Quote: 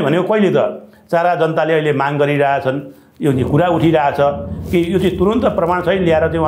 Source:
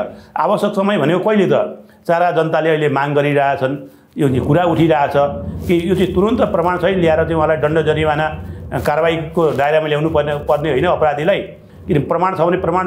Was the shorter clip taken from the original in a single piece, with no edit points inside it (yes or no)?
yes